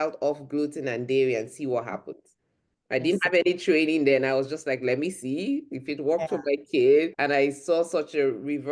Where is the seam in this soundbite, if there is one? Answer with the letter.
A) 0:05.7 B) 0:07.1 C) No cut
B